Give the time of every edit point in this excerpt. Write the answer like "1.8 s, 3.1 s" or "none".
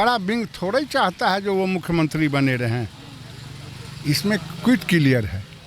none